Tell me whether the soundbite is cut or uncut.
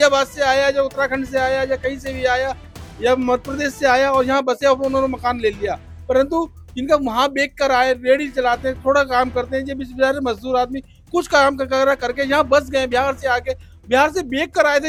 uncut